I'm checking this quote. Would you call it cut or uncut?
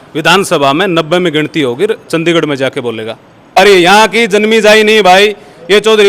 cut